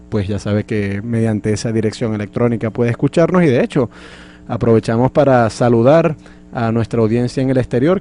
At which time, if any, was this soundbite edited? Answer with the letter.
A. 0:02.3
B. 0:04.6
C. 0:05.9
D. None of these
D